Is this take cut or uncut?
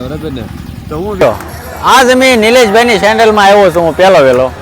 cut